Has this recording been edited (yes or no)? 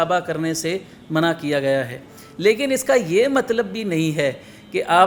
no